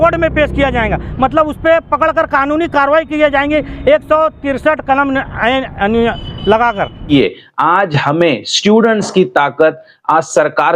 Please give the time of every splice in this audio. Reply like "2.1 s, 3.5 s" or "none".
7.1 s